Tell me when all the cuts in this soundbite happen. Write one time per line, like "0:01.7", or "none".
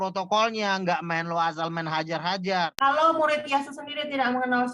0:02.7